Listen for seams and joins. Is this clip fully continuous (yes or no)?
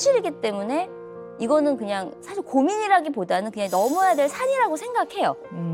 yes